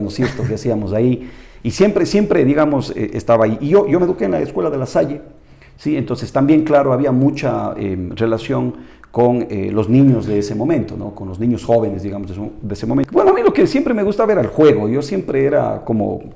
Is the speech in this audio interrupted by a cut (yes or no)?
yes